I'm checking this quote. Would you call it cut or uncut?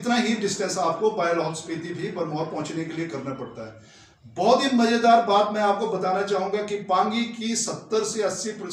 uncut